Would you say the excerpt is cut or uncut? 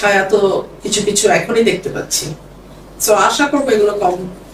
uncut